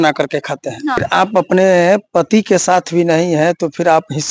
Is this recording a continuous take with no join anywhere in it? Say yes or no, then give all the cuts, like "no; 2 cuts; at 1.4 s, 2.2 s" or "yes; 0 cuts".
no; 1 cut; at 1.0 s